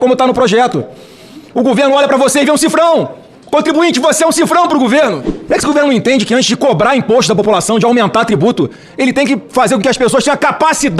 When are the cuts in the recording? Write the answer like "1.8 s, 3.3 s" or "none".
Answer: 5.3 s